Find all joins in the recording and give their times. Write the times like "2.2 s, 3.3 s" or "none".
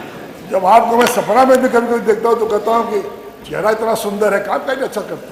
none